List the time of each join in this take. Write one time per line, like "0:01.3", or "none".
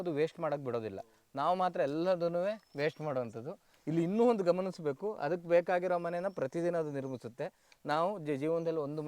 none